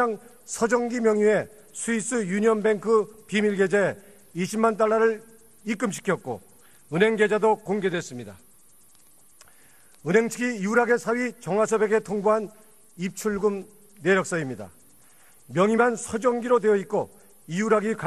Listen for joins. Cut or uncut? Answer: uncut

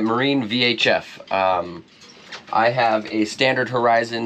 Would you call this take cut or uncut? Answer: uncut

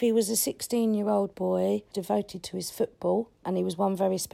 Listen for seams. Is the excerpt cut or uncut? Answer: cut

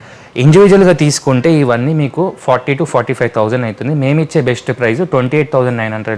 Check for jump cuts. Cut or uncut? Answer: uncut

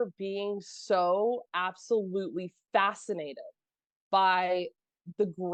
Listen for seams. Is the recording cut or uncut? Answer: uncut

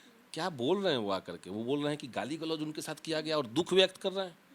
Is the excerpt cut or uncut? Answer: uncut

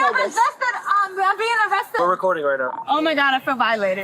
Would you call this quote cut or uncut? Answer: cut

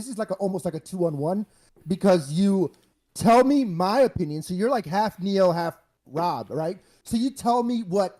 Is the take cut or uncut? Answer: uncut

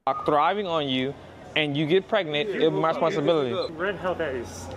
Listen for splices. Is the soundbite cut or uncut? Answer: cut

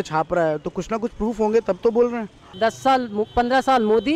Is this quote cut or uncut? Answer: cut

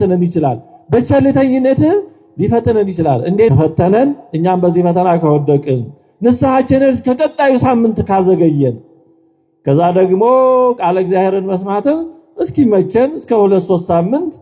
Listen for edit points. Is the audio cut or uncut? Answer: cut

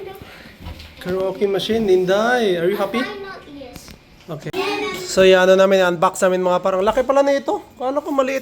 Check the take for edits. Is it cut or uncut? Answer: cut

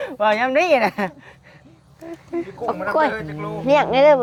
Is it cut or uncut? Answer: uncut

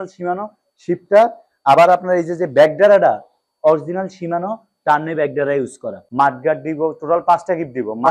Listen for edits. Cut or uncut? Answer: cut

